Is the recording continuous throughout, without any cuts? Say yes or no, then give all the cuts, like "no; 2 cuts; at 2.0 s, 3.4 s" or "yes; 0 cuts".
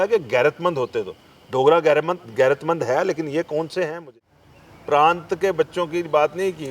no; 1 cut; at 4.0 s